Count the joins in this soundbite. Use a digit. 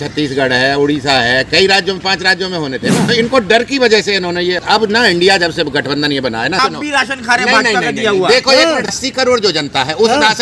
4